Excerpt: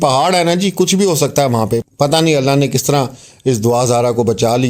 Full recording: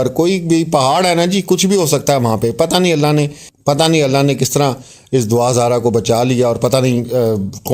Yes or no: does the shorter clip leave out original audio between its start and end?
yes